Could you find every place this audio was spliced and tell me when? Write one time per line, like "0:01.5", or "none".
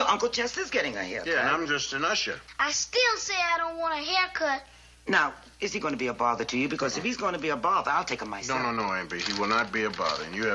0:01.1